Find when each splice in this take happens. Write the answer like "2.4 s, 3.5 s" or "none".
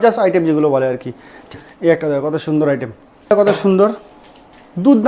1.5 s, 3.3 s

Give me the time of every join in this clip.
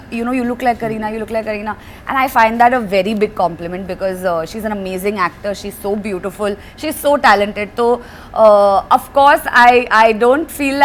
none

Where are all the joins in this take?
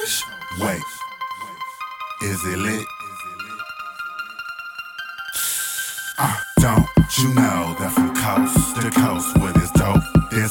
none

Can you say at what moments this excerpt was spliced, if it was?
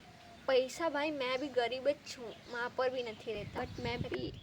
3.3 s

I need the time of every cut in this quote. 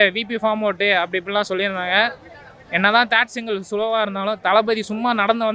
none

